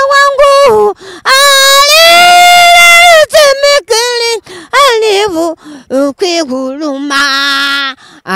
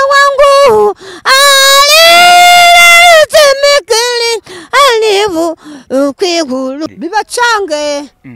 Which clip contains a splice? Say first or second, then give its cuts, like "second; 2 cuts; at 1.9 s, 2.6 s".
second; 1 cut; at 6.9 s